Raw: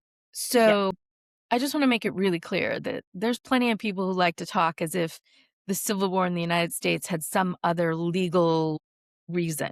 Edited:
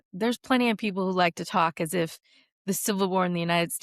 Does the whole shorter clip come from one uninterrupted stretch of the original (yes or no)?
yes